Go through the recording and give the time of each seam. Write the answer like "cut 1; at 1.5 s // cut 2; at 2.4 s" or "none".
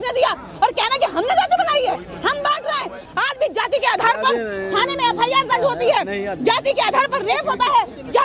cut 1; at 3.0 s